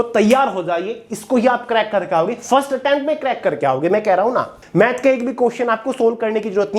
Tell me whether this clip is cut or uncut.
cut